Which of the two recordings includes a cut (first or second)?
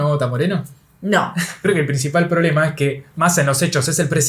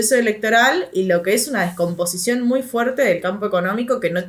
first